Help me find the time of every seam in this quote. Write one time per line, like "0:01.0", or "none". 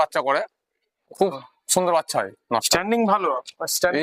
0:02.7